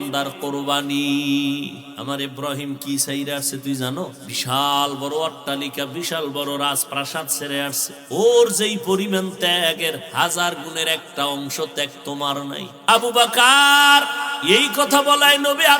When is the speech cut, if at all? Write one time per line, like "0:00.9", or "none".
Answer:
0:01.9
0:04.3
0:07.9
0:12.7
0:14.3